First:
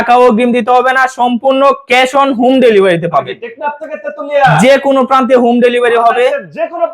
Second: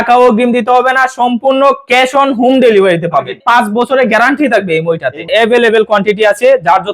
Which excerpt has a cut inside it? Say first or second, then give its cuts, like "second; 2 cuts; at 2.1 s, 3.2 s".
second; 2 cuts; at 3.4 s, 5.2 s